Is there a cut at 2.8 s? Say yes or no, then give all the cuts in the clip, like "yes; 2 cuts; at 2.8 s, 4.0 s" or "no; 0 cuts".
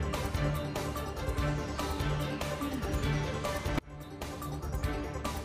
yes; 1 cut; at 2.8 s